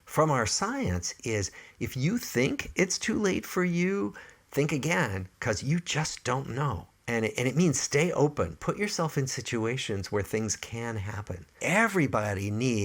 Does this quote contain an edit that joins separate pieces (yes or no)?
yes